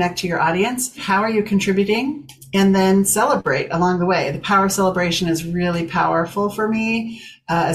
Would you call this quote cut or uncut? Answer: cut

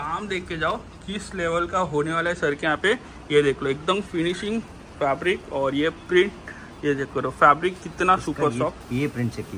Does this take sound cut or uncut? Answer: uncut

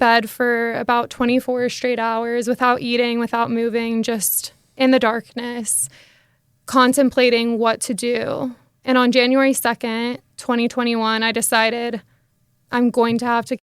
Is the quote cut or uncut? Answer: uncut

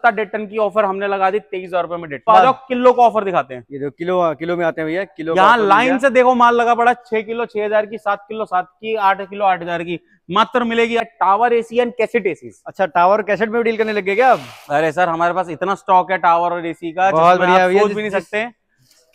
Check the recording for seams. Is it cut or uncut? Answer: cut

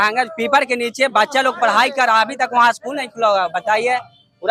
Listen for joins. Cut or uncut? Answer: uncut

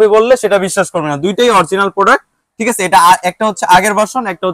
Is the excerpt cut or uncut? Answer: uncut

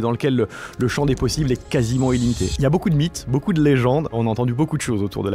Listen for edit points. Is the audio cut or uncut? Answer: cut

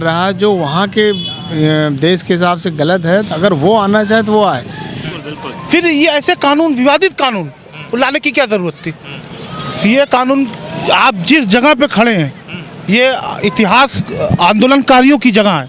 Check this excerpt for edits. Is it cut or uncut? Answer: cut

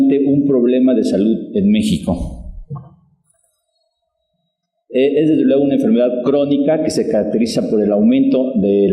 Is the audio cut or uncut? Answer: cut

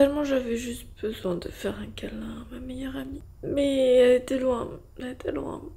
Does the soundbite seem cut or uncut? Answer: uncut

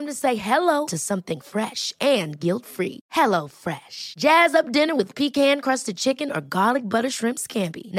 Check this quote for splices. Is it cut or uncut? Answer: uncut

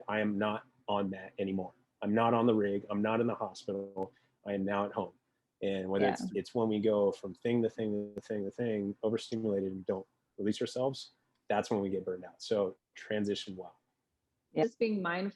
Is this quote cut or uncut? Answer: cut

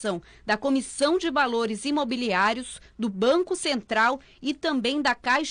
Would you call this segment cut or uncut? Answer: uncut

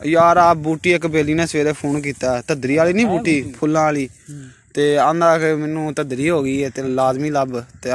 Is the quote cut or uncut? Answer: uncut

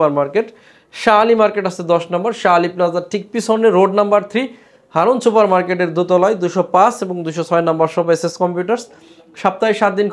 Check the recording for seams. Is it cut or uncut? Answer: uncut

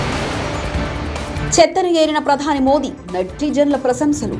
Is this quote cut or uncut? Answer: cut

